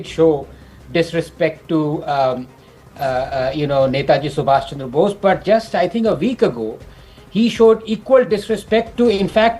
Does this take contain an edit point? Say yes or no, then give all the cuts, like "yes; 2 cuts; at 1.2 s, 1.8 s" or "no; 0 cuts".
no; 0 cuts